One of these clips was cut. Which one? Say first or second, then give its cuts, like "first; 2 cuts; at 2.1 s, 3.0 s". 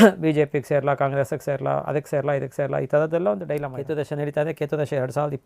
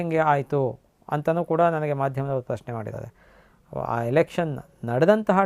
first; 1 cut; at 3.7 s